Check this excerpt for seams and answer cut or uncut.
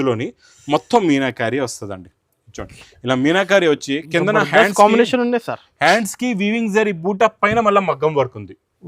uncut